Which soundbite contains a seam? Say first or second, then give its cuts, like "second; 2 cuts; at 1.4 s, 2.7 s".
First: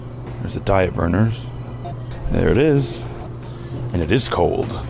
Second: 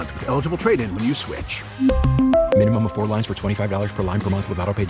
first; 1 cut; at 3.1 s